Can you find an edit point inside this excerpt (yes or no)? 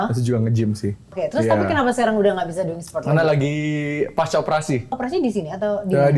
yes